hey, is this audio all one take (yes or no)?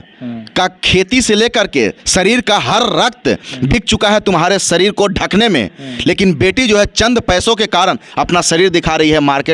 yes